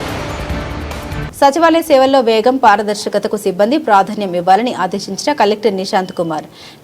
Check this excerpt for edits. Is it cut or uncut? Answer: cut